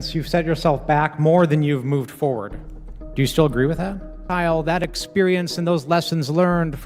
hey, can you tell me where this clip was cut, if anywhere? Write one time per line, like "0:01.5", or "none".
0:04.2